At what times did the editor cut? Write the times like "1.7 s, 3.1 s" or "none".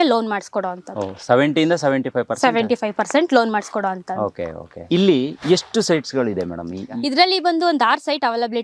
none